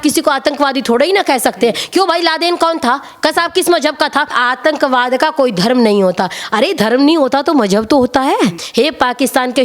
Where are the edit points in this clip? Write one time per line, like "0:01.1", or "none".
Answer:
0:04.4
0:08.6

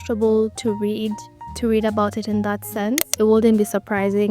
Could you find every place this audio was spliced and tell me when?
0:03.1

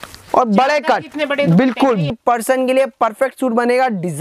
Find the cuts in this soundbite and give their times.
0:02.1

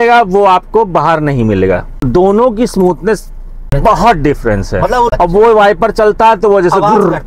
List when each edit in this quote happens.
0:02.0
0:03.5
0:05.1

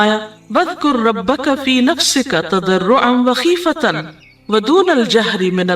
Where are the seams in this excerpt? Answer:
0:01.2

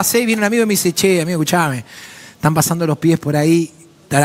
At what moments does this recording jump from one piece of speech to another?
none

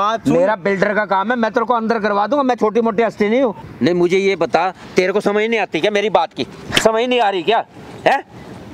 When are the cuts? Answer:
0:03.6

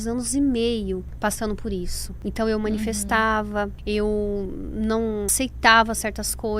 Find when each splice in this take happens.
0:01.1
0:02.0
0:03.8
0:05.3

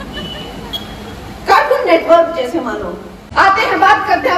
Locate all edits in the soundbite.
0:03.5

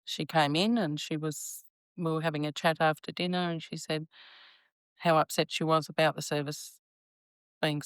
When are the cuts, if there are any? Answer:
none

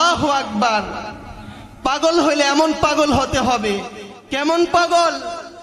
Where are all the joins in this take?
none

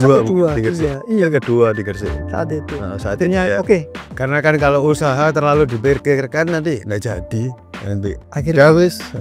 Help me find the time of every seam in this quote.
0:04.0

